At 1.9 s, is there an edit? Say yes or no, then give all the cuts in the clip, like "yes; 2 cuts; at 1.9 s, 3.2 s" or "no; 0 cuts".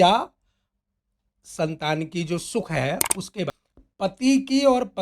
no; 1 cut; at 3.5 s